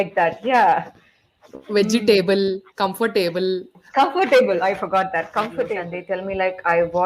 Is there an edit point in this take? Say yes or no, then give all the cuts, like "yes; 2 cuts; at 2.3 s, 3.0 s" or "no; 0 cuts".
yes; 1 cut; at 5.9 s